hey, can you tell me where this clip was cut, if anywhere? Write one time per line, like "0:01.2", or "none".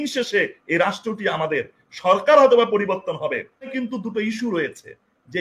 0:03.8